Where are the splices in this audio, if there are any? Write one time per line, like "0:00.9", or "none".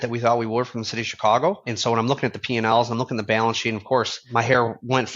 0:01.7
0:04.2